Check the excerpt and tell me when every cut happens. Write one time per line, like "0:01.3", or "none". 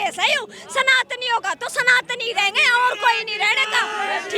none